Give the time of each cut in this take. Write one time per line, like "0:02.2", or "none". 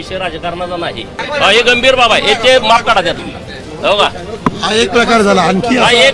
0:01.1
0:03.2